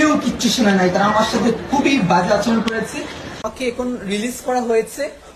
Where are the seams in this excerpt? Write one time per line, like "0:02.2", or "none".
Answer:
0:03.4